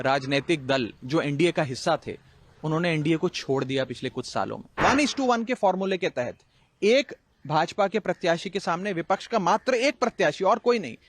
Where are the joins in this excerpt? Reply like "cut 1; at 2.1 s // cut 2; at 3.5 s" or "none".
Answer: cut 1; at 4.8 s